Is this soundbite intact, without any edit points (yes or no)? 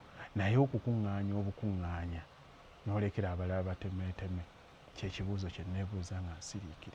yes